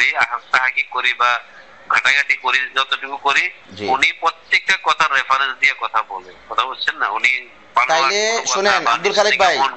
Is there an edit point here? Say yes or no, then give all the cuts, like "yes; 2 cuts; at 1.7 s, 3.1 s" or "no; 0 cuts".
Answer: no; 0 cuts